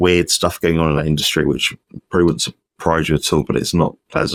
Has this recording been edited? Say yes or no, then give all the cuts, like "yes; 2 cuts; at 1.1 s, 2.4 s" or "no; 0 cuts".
no; 0 cuts